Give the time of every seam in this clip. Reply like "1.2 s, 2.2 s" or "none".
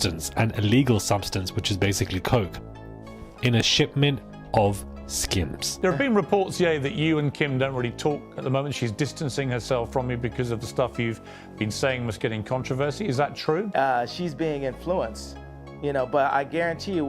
5.7 s, 13.7 s

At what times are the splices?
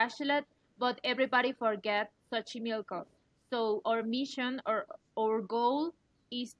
none

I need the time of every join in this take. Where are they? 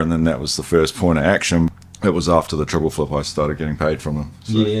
1.7 s

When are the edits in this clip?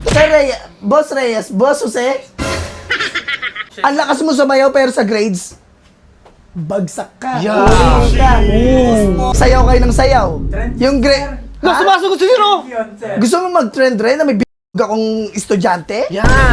3.7 s, 9.3 s

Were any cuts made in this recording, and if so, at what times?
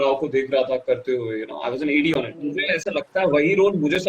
2.4 s

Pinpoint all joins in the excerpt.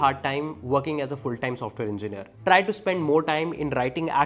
2.2 s

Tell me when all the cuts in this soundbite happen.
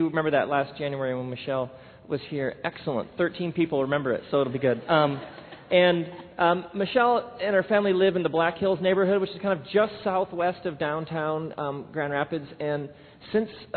none

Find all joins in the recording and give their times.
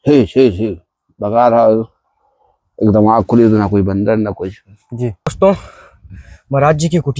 5.3 s

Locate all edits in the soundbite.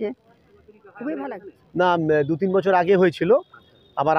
1.5 s

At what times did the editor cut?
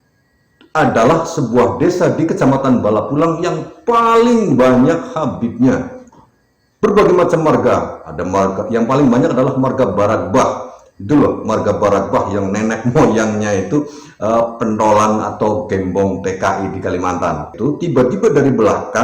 17.5 s

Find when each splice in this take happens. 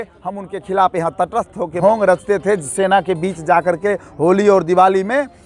1.7 s

